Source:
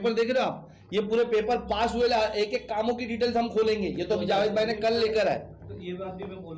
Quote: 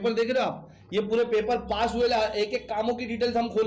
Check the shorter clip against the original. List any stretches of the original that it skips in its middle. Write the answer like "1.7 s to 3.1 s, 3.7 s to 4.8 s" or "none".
none